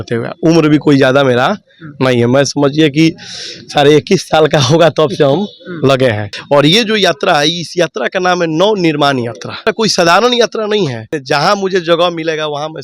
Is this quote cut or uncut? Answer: cut